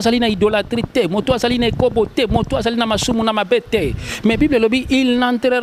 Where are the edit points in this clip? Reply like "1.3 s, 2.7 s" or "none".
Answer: none